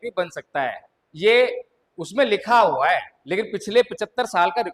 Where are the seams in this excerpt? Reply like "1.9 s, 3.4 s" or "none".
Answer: 3.2 s